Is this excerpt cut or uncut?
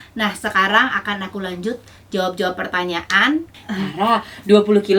cut